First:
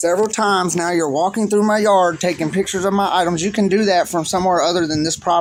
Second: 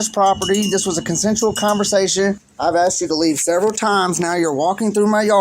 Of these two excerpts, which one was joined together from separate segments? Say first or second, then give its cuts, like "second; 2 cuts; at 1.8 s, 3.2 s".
second; 1 cut; at 2.5 s